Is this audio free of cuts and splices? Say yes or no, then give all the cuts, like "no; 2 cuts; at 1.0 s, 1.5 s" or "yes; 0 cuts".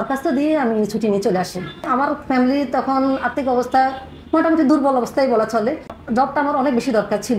no; 1 cut; at 1.9 s